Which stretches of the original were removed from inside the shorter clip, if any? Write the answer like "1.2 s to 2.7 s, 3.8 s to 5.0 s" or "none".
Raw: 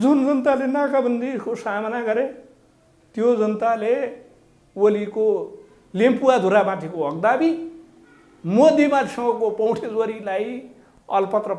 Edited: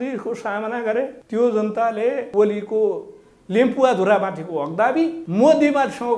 2.4 s to 3.0 s, 4.1 s to 4.7 s, 7.7 s to 8.4 s